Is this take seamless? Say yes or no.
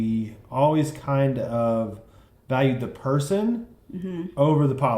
yes